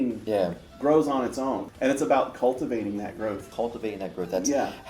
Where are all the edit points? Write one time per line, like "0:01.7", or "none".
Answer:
0:01.7
0:03.5